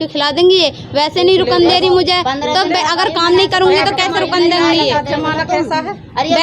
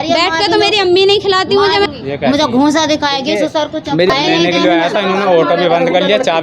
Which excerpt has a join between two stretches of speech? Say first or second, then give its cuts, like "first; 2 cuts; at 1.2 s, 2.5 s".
second; 2 cuts; at 1.9 s, 4.1 s